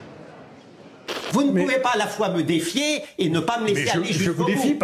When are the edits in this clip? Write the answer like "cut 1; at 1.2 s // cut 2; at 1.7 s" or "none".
cut 1; at 1.2 s